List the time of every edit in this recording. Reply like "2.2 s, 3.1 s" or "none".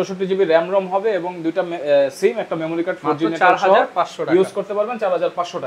none